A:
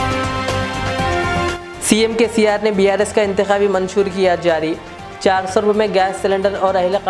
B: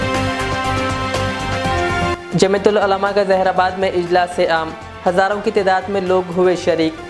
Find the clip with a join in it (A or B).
A